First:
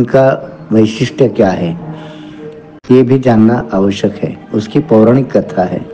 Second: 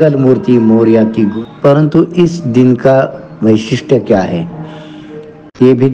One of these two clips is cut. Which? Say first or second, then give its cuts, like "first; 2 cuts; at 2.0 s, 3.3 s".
second; 1 cut; at 1.3 s